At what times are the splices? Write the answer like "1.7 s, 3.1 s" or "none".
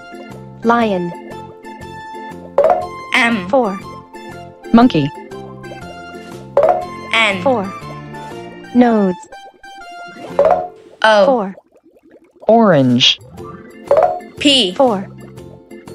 none